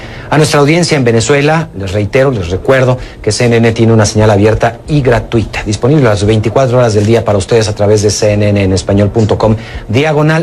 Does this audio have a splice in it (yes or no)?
yes